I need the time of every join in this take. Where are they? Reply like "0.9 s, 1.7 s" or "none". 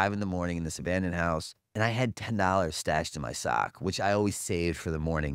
1.7 s